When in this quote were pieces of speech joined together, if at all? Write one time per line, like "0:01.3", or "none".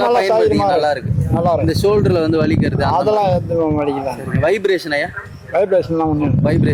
none